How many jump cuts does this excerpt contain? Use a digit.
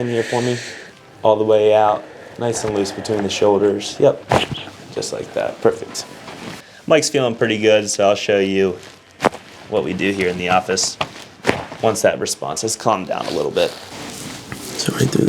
2